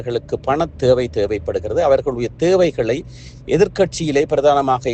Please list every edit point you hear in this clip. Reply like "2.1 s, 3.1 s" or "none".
none